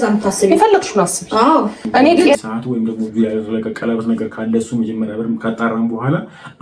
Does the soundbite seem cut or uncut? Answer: cut